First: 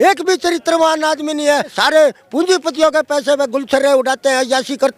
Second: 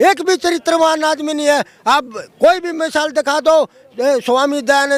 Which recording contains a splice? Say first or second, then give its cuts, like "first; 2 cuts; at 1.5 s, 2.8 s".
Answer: first; 1 cut; at 1.8 s